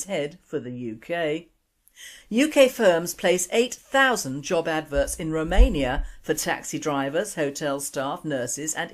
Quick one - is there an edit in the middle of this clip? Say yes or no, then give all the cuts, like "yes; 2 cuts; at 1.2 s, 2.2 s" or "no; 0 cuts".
yes; 1 cut; at 6.6 s